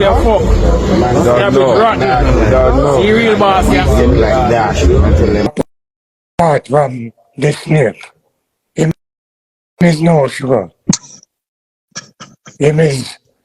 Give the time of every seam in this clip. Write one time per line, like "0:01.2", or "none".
0:05.5